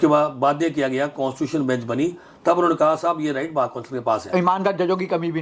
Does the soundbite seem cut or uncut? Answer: cut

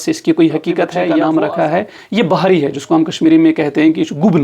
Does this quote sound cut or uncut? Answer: cut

